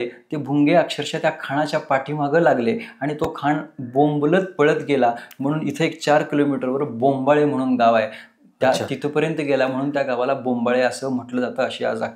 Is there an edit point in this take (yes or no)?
no